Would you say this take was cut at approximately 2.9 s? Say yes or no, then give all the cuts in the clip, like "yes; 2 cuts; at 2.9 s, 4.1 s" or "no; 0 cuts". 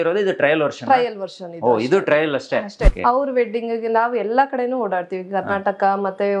yes; 1 cut; at 2.9 s